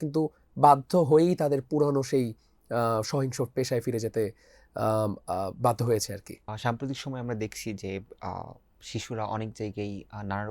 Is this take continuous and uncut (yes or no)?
no